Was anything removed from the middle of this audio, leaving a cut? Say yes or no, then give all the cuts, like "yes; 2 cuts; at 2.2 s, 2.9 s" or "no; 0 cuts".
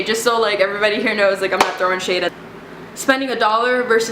yes; 1 cut; at 2.3 s